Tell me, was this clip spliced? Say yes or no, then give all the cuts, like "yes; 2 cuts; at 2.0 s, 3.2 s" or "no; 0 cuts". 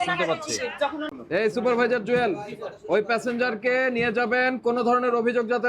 yes; 1 cut; at 1.1 s